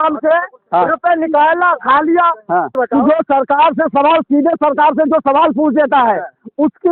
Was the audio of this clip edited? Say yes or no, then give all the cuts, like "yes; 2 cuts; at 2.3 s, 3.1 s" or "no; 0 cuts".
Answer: yes; 1 cut; at 2.7 s